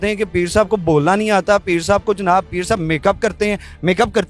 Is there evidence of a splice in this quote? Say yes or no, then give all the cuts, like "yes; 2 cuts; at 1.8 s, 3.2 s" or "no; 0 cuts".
no; 0 cuts